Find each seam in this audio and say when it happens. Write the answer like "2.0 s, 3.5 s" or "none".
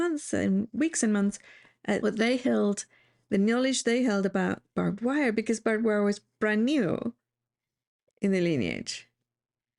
2.0 s